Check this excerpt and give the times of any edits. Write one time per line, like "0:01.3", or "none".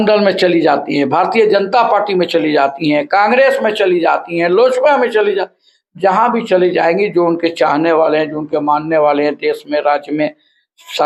none